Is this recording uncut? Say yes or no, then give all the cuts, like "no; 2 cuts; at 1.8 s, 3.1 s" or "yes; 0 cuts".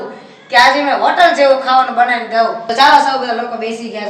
no; 1 cut; at 2.6 s